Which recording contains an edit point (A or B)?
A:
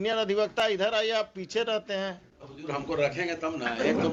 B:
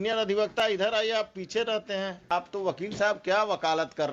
B